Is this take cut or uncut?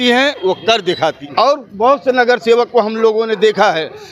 cut